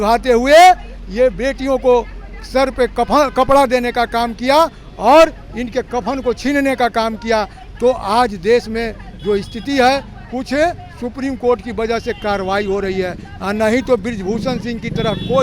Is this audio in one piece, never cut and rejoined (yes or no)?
yes